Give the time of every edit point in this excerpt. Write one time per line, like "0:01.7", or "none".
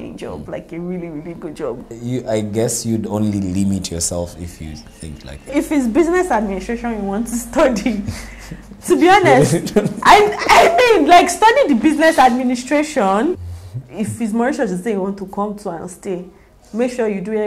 0:01.9
0:05.5
0:13.4

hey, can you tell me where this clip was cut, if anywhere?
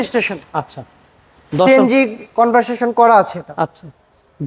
none

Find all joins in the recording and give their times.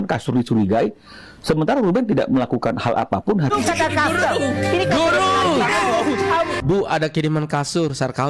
0:03.5
0:06.5

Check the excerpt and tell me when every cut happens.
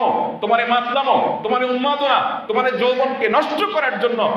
none

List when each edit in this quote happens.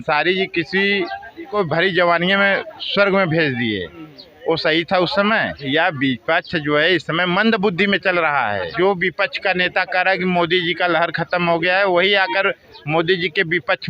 0:01.5
0:05.6
0:08.7

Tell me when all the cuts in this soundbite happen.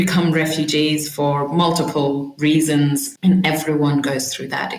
0:02.6

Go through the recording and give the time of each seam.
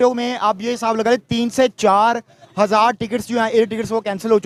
none

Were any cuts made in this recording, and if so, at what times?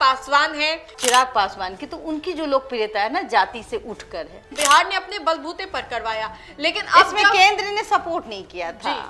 0:00.9
0:04.4

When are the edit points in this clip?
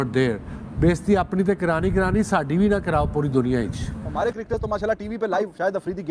0:04.0

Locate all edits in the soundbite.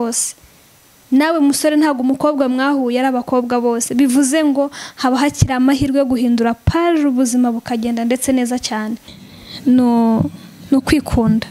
0:09.1

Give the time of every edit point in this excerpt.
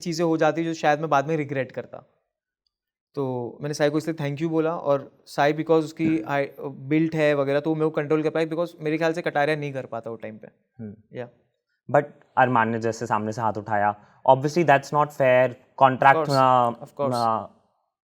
none

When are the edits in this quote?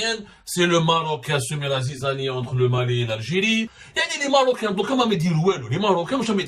0:03.8

